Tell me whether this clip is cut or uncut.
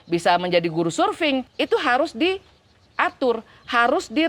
cut